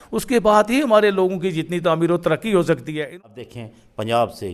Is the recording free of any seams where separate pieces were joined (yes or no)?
no